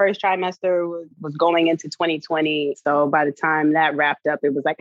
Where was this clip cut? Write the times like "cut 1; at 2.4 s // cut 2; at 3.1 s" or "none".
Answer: cut 1; at 1.1 s // cut 2; at 2.8 s